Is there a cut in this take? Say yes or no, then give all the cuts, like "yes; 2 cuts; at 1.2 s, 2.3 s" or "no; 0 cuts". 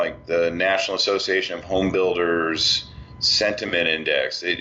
yes; 1 cut; at 3.6 s